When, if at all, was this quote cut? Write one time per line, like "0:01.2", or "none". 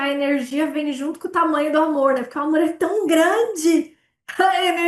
none